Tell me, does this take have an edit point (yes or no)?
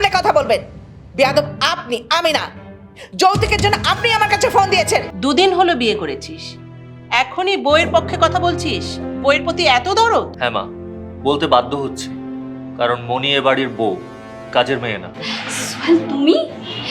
yes